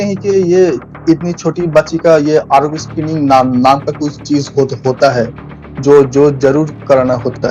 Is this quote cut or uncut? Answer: uncut